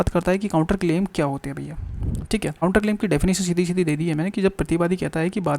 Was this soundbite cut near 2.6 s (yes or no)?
yes